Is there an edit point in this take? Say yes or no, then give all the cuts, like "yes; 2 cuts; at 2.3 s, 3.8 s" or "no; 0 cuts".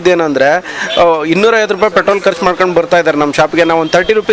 no; 0 cuts